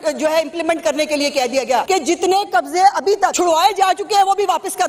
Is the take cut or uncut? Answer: cut